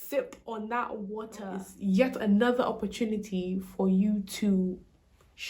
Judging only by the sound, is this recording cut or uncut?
cut